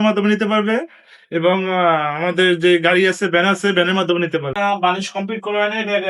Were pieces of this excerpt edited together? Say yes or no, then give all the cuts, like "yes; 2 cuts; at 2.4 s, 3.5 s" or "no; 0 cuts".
yes; 1 cut; at 4.5 s